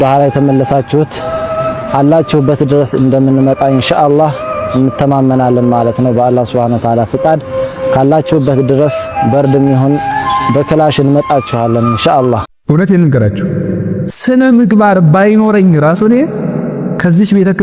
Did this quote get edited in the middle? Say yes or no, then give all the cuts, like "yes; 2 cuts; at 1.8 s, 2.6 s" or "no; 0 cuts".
yes; 1 cut; at 12.5 s